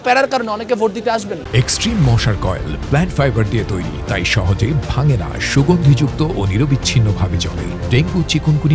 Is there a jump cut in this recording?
no; 0 cuts

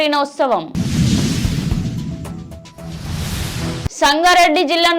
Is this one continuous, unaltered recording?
no; 2 cuts; at 1.0 s, 3.9 s

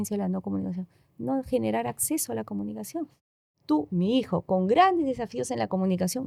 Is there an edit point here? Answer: no; 0 cuts

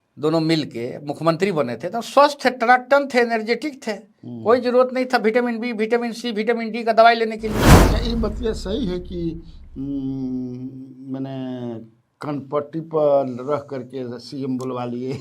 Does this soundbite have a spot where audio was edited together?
yes; 1 cut; at 7.8 s

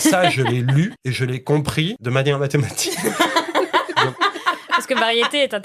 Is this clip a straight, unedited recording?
no; 2 cuts; at 1.0 s, 2.0 s

